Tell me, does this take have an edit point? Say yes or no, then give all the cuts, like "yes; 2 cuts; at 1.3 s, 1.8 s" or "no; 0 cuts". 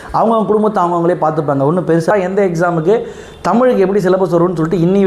yes; 1 cut; at 2.1 s